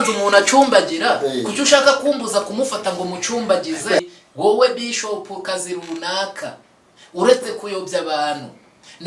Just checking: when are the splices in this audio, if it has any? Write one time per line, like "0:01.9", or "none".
0:04.0